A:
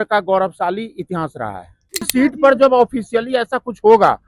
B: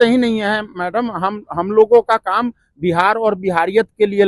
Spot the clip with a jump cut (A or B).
A